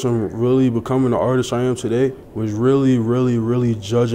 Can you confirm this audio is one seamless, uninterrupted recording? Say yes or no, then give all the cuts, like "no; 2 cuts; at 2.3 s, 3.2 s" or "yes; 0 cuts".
no; 1 cut; at 2.3 s